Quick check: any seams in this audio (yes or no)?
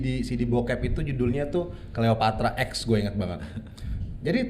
no